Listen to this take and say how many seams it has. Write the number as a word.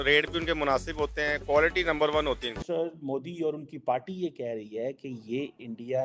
one